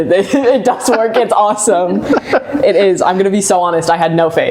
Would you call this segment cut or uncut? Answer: uncut